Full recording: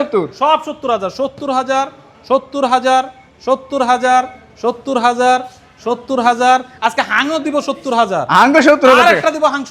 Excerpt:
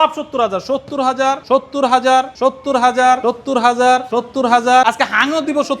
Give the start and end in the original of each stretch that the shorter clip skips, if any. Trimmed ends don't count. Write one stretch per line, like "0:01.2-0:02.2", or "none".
0:01.9-0:02.2
0:03.1-0:03.4
0:04.3-0:04.6
0:05.5-0:05.8
0:06.6-0:06.8